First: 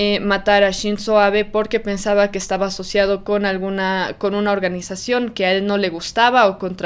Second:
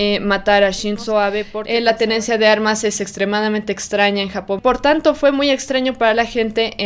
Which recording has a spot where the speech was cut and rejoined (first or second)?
second